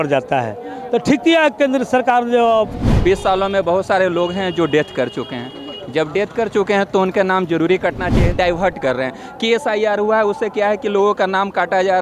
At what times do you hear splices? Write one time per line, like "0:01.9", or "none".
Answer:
0:02.8
0:08.3